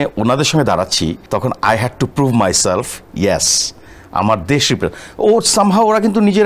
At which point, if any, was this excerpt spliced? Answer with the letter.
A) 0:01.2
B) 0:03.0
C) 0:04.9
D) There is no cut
A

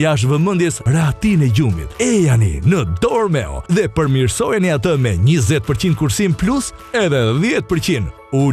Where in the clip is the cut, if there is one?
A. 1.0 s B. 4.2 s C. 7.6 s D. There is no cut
D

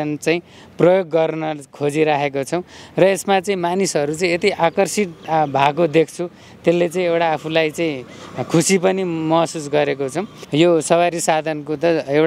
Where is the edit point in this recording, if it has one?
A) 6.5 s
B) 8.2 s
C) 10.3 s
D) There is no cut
C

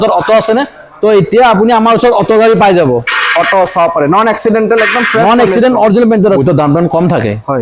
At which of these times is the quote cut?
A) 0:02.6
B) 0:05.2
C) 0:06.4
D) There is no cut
C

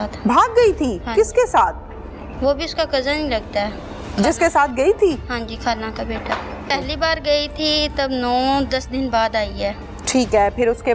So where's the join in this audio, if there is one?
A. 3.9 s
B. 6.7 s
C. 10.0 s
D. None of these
B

